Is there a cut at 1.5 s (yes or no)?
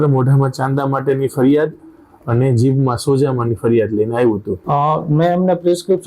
no